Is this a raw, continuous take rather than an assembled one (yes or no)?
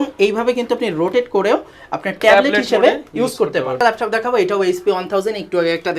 no